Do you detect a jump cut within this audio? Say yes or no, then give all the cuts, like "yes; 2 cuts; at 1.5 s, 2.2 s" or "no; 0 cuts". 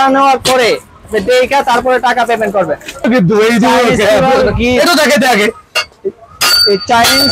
yes; 1 cut; at 3.0 s